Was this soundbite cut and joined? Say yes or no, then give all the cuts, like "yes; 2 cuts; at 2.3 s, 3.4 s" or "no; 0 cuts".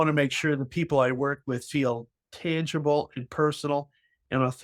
no; 0 cuts